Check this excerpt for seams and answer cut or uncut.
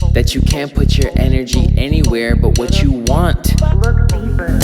uncut